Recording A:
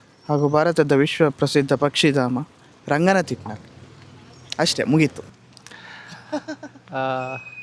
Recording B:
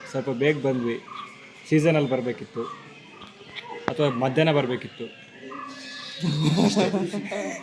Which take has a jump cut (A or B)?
A